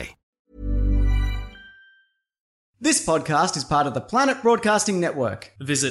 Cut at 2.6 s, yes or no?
yes